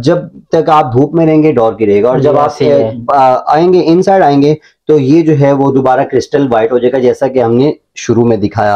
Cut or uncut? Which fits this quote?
uncut